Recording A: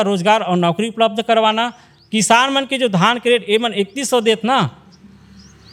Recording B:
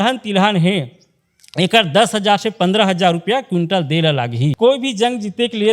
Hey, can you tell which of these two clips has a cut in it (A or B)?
B